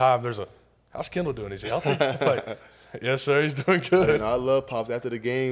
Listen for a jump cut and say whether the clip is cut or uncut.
uncut